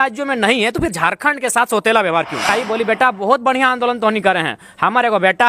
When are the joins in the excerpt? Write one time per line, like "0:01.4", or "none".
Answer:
0:02.5